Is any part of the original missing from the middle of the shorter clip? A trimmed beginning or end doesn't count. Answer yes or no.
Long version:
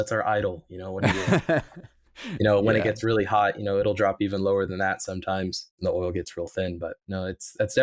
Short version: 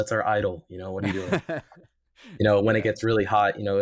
no